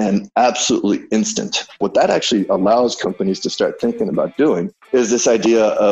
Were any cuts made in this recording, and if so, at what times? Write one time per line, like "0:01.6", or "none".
0:01.8
0:04.8